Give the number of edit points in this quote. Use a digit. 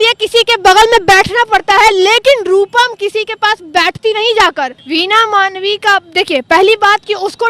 1